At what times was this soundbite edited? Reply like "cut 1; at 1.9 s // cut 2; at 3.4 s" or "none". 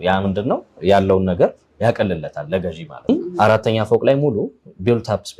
cut 1; at 3.1 s